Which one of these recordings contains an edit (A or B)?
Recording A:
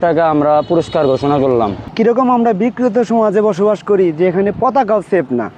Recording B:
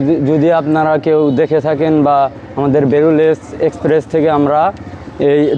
A